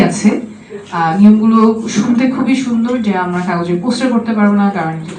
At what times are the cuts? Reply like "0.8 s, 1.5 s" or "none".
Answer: none